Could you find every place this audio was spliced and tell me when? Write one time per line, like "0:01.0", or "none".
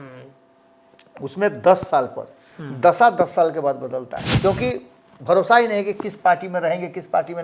0:04.2